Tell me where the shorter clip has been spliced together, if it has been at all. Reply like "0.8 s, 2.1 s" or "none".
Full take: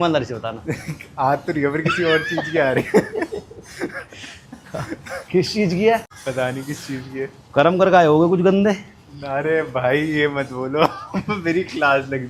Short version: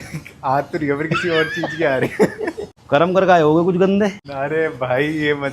2.7 s, 4.2 s